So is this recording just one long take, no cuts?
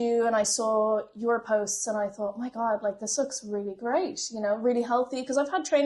yes; 0 cuts

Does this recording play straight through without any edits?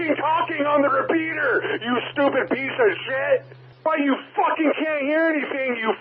no; 1 cut; at 3.6 s

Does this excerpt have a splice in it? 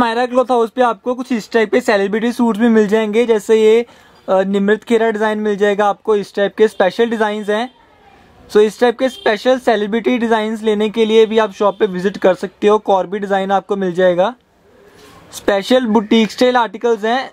no; 0 cuts

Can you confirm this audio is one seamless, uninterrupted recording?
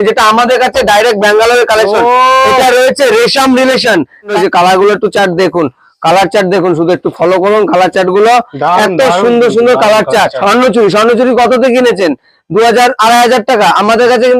no; 2 cuts; at 4.3 s, 10.4 s

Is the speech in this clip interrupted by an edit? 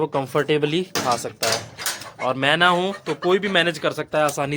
no; 0 cuts

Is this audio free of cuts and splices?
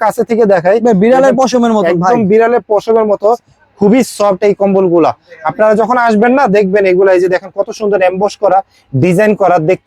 yes; 0 cuts

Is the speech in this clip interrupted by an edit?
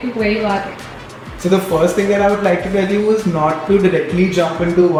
no; 0 cuts

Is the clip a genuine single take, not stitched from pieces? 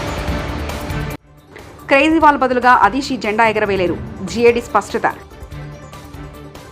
no; 1 cut; at 1.3 s

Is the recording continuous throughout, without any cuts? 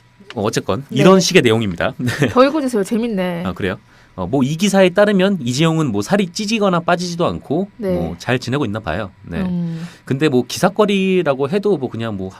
no; 1 cut; at 8.5 s

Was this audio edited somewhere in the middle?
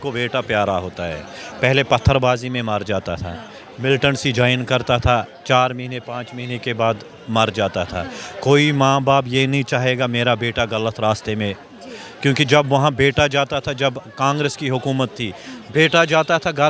no; 0 cuts

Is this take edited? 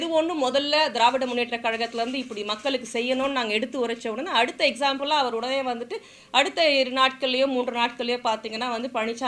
no; 0 cuts

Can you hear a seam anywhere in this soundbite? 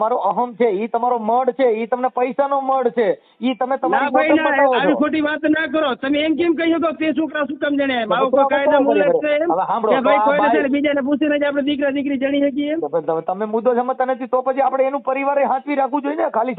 no; 0 cuts

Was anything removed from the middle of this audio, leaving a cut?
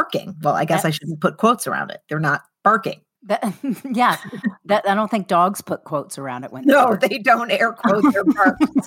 yes; 1 cut; at 3.1 s

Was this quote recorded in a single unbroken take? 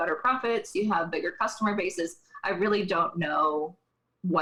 yes; 0 cuts

